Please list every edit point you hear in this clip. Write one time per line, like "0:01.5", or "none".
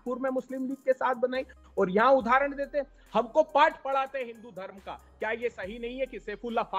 none